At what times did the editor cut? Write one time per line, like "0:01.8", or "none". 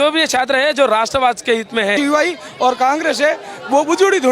0:01.9

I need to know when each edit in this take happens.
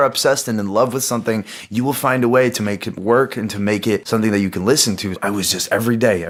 none

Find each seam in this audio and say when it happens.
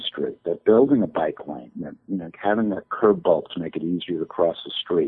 none

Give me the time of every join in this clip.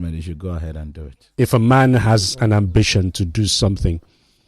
0:01.3

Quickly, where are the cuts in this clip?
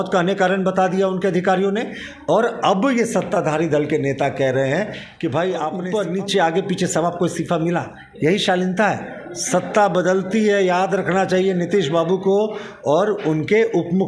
0:05.8

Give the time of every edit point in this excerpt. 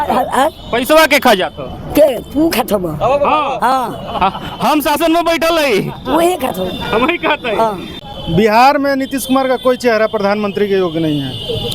0:07.9

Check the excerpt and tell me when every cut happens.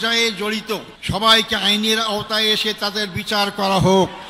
0:00.9

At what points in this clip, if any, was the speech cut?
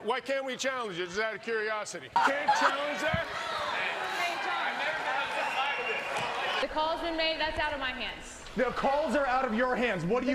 0:02.0
0:06.6

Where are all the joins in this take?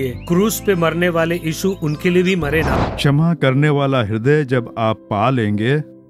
0:02.8

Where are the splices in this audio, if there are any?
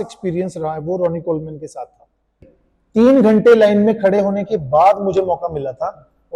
0:02.6

